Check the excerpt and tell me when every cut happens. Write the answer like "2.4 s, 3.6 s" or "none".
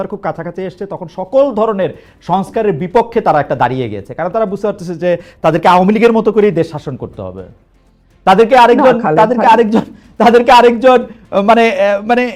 none